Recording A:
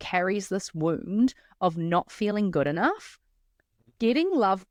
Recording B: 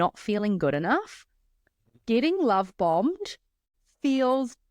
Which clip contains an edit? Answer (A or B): B